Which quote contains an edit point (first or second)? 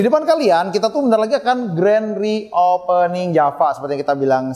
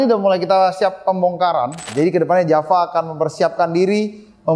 second